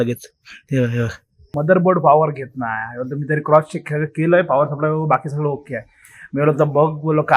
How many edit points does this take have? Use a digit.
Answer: 1